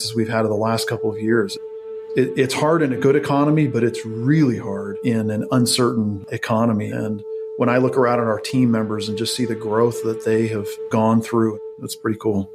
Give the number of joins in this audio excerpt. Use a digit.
2